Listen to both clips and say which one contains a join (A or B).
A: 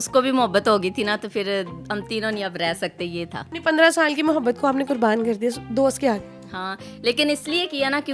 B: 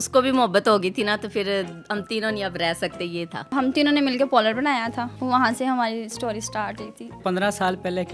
B